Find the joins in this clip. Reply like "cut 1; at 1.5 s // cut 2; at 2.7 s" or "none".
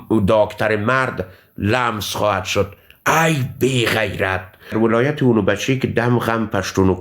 cut 1; at 4.7 s